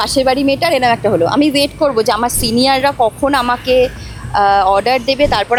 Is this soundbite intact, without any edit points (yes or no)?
yes